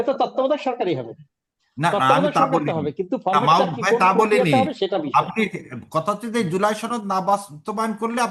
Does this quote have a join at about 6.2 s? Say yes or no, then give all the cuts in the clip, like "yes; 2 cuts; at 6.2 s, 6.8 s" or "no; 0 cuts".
no; 0 cuts